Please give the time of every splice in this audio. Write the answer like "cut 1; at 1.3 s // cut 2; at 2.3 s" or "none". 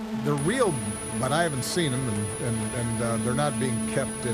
none

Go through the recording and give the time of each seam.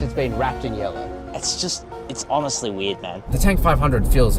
cut 1; at 3.2 s

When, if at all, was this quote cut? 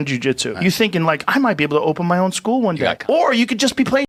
none

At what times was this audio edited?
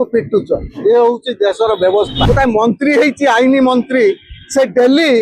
cut 1; at 2.2 s

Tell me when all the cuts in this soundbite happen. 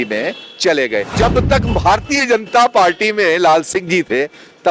cut 1; at 1.1 s

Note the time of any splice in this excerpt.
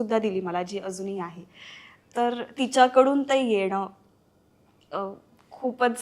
none

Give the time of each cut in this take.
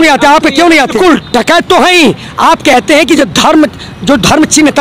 cut 1; at 1.0 s

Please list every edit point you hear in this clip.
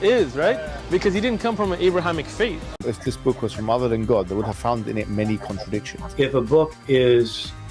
cut 1; at 2.7 s

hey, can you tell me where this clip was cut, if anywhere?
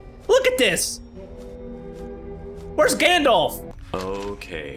cut 1; at 3.8 s

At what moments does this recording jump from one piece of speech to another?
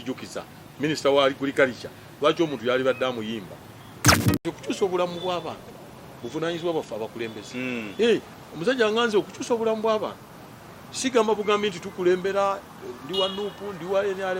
cut 1; at 4.2 s

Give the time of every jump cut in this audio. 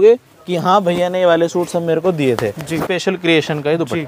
cut 1; at 2.8 s

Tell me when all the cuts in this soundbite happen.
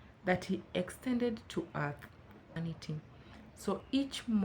cut 1; at 2.6 s

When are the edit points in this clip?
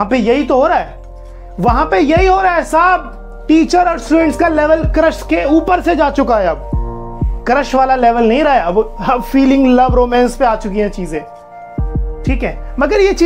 none

